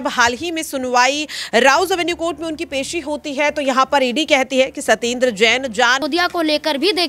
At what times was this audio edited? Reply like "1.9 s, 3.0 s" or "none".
6.0 s